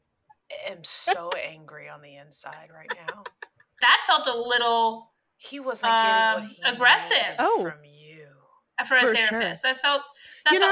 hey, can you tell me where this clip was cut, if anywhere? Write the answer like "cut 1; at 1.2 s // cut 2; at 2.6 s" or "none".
cut 1; at 3.8 s

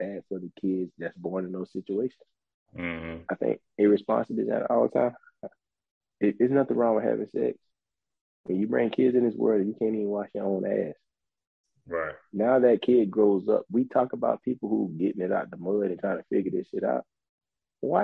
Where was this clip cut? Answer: none

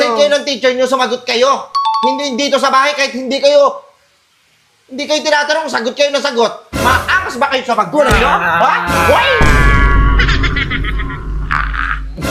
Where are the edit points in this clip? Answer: none

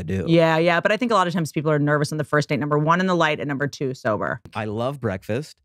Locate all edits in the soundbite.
cut 1; at 4.5 s

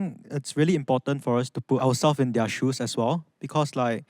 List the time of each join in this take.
cut 1; at 1.8 s

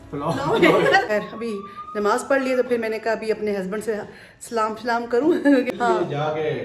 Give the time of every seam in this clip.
cut 1; at 1.1 s // cut 2; at 5.7 s

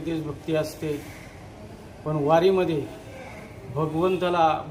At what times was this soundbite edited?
none

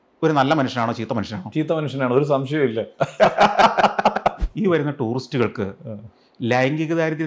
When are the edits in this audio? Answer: cut 1; at 4.4 s

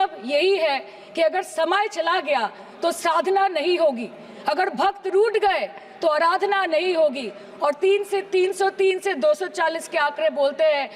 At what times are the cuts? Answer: none

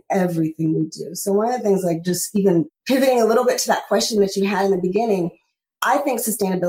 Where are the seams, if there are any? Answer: none

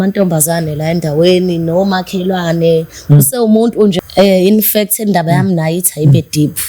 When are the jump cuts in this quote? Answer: cut 1; at 3.9 s

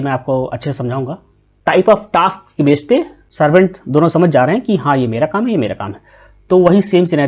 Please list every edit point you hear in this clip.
cut 1; at 1.5 s

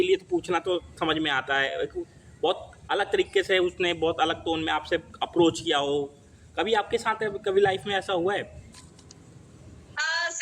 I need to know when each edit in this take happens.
cut 1; at 8.7 s

